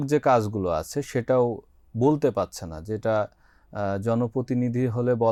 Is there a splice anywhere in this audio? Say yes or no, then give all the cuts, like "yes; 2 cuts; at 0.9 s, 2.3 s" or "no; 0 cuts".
no; 0 cuts